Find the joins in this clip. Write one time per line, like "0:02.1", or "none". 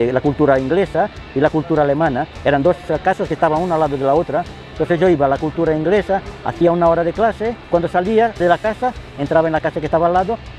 none